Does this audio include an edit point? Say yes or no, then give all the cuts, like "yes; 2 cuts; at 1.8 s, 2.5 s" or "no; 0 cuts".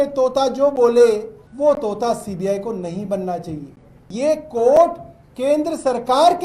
yes; 2 cuts; at 1.4 s, 4.1 s